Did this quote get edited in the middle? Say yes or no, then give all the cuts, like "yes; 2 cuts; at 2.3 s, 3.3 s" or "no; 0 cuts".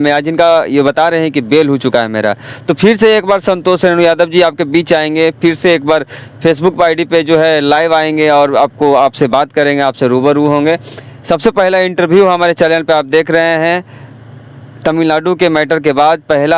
no; 0 cuts